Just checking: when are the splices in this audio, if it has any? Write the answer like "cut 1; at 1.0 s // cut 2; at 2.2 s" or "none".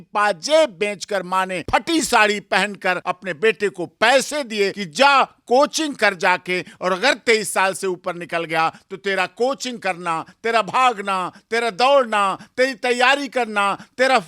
cut 1; at 1.6 s // cut 2; at 3.1 s // cut 3; at 4.8 s